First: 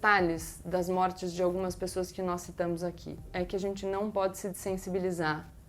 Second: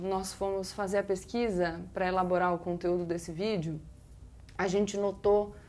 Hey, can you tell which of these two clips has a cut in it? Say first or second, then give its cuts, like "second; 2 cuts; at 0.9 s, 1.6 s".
first; 1 cut; at 3.3 s